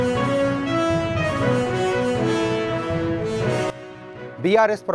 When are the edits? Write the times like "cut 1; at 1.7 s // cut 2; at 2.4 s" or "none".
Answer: cut 1; at 3.7 s